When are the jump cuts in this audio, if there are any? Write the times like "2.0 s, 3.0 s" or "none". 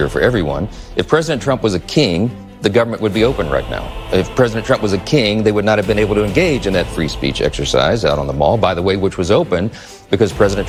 none